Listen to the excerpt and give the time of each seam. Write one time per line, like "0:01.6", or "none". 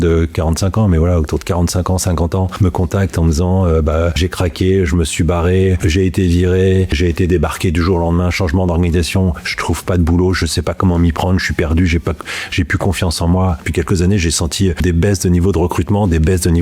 0:02.5
0:04.2
0:05.8
0:06.9
0:13.6
0:14.8